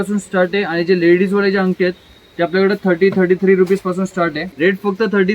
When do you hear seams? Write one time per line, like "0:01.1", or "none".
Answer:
0:04.5